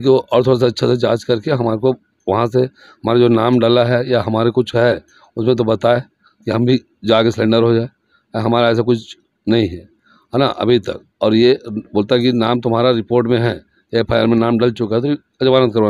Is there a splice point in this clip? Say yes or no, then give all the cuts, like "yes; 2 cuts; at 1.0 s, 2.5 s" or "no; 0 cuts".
no; 0 cuts